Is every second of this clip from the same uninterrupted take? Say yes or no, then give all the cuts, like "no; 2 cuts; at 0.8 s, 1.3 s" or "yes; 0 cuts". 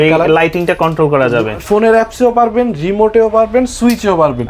yes; 0 cuts